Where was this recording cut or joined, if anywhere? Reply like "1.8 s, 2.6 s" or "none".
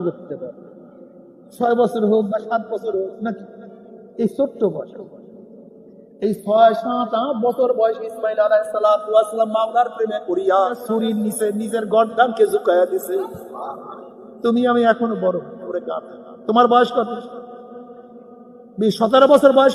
10.8 s